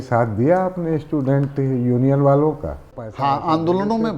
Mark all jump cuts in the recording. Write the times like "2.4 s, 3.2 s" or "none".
3.0 s